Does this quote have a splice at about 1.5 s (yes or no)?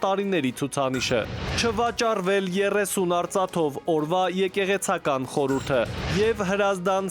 yes